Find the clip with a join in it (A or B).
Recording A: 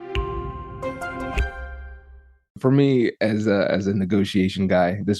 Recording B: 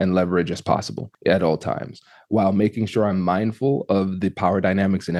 A